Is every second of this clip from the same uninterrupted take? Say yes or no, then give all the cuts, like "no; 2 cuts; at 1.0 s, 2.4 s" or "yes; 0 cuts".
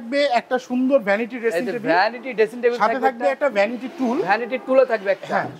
yes; 0 cuts